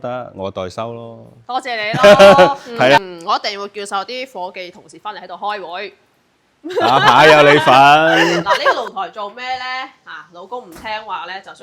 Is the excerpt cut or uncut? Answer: cut